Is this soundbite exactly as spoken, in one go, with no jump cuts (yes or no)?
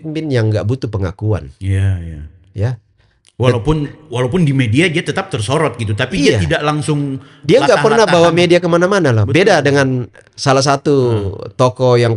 yes